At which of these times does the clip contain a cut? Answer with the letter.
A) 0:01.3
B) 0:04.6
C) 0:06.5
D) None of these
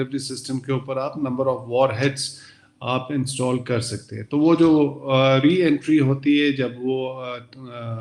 D